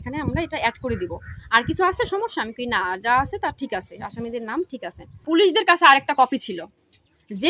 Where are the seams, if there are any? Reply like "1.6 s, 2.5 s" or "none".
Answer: 5.2 s